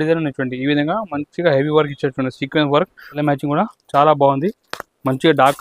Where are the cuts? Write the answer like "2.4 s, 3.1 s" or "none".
3.0 s